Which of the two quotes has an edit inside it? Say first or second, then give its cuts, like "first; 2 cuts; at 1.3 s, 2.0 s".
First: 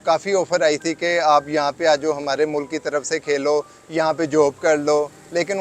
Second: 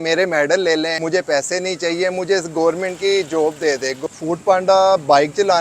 second; 2 cuts; at 1.0 s, 4.0 s